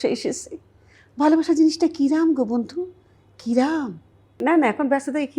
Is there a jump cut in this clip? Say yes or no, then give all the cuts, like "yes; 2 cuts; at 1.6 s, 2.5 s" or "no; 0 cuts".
yes; 1 cut; at 4.3 s